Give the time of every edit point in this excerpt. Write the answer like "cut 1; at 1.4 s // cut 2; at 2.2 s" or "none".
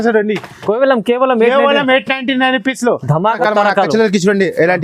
cut 1; at 3.4 s